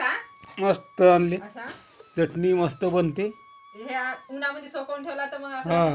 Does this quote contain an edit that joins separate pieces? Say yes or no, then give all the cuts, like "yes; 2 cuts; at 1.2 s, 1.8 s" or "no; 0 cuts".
no; 0 cuts